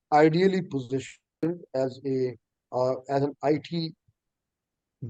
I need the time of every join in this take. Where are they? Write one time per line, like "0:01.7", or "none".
none